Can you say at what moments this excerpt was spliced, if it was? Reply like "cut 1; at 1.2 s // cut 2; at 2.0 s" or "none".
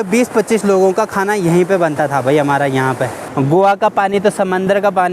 cut 1; at 3.2 s